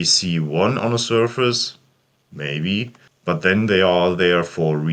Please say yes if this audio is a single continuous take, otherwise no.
no